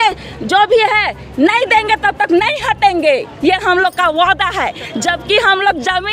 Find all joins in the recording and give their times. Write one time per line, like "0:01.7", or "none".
none